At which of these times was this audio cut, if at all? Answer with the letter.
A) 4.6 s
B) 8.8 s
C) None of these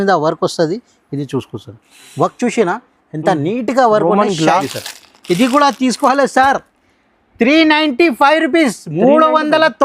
A